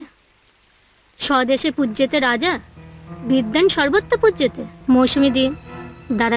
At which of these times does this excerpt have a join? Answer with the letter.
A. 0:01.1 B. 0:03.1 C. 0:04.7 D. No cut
C